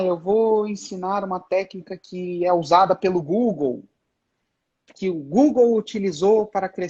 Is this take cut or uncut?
uncut